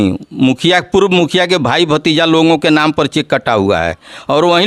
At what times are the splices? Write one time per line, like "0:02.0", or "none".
none

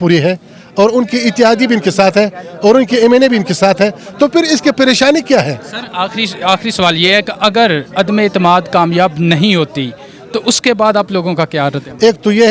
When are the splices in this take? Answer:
none

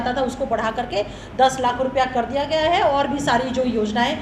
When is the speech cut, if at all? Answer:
none

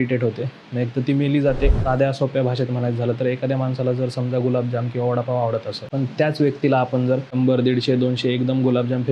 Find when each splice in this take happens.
0:01.8
0:05.8
0:07.3

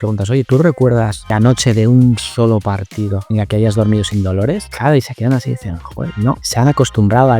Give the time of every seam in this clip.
0:01.3
0:03.2
0:04.7
0:06.4

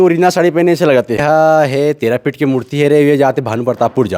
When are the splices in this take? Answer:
0:01.2

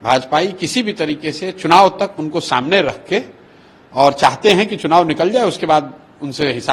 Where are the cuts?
none

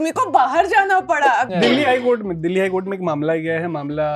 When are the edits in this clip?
0:01.5

